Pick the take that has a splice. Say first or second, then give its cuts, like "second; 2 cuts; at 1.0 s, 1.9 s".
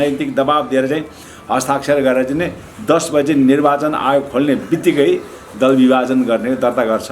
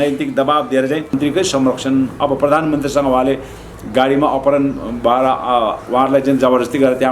second; 1 cut; at 1.2 s